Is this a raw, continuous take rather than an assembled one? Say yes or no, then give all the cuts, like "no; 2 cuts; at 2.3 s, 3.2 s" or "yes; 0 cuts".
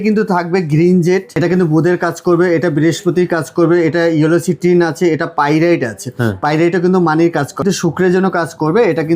no; 2 cuts; at 1.4 s, 7.6 s